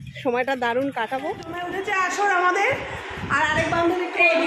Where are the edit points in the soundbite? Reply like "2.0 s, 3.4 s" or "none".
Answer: 1.7 s